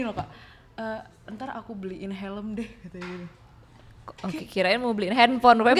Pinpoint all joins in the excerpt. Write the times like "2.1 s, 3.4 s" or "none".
none